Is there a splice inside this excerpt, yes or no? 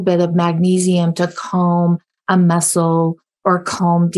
no